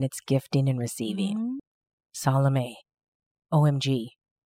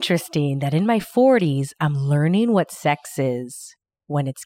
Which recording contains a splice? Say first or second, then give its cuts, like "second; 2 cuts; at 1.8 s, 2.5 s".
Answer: first; 1 cut; at 1.6 s